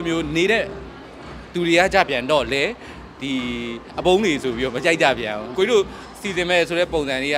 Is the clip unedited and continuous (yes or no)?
no